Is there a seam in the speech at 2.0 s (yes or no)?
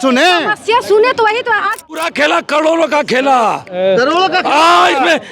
yes